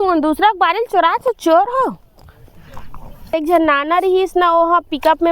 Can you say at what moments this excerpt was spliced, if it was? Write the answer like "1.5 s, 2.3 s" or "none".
3.3 s